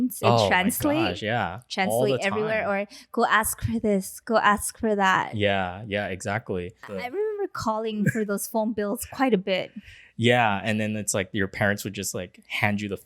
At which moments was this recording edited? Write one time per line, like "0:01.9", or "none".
0:06.9